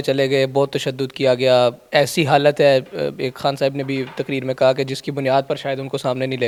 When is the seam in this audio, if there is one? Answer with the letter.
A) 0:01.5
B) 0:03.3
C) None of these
C